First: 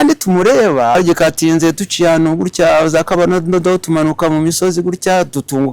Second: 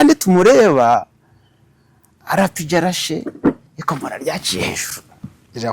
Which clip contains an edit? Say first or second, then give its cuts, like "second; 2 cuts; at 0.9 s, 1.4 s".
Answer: first; 1 cut; at 1.0 s